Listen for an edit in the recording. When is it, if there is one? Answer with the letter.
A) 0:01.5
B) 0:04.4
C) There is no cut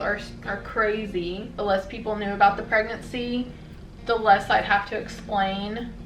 A